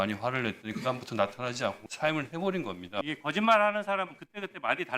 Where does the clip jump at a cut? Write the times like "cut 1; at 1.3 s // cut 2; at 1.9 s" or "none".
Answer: cut 1; at 1.8 s // cut 2; at 3.1 s